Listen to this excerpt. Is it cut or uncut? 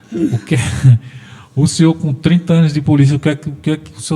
uncut